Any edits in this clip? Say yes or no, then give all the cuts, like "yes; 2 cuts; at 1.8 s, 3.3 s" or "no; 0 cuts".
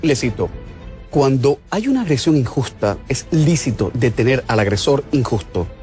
yes; 1 cut; at 3.2 s